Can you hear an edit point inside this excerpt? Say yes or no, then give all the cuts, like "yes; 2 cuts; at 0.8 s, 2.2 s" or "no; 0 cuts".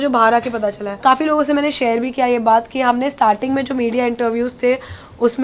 yes; 1 cut; at 1.0 s